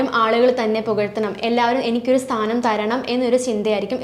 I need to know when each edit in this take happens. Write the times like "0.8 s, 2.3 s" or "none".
none

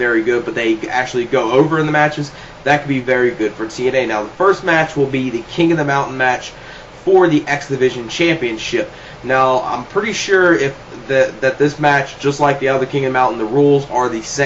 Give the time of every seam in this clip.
11.8 s

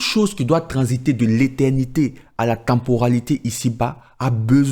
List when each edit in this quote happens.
none

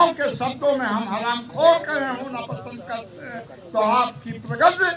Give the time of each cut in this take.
none

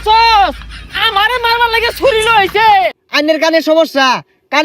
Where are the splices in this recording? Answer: 3.0 s

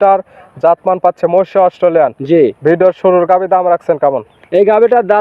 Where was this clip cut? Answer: none

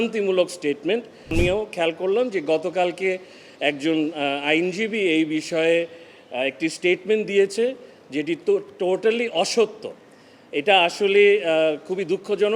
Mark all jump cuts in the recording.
1.3 s

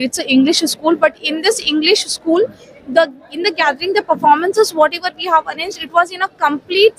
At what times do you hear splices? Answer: none

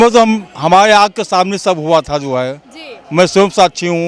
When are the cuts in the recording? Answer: none

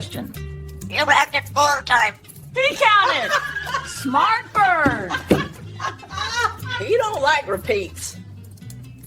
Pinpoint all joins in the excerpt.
none

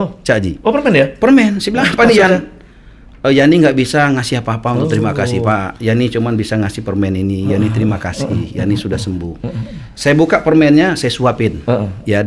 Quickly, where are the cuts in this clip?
none

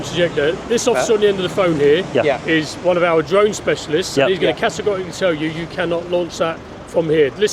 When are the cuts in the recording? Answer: none

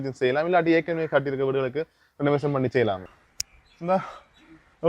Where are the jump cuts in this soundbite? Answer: 3.0 s

